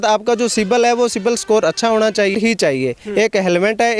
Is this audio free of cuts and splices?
no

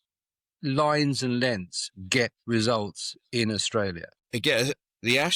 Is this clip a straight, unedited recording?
no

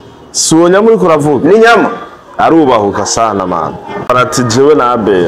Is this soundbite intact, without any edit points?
no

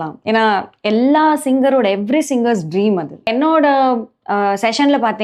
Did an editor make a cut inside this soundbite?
yes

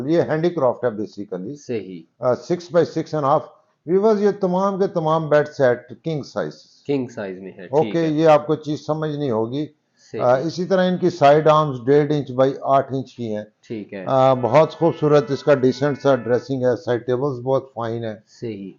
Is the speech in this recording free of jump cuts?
yes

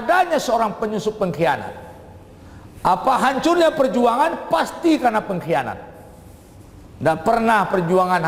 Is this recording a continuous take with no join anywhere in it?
yes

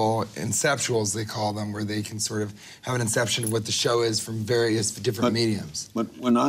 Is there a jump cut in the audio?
no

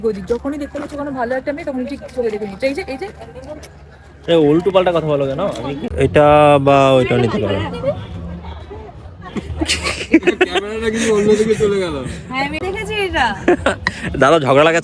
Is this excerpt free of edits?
no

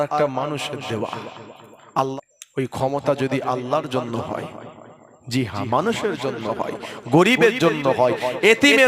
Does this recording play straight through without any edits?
no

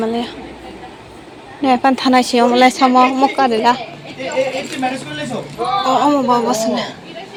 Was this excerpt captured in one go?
yes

